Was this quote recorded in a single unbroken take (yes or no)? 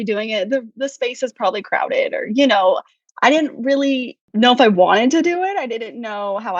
no